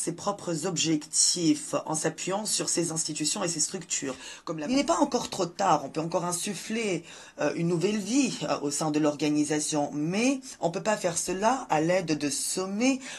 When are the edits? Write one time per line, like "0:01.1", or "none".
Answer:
0:04.3